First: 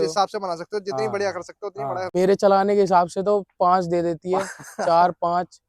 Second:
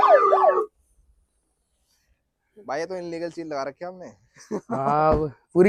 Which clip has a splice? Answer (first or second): first